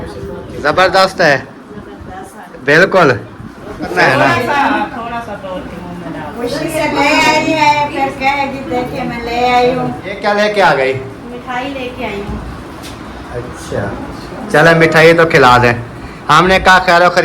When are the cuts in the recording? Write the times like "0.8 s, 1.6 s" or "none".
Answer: 4.0 s, 10.1 s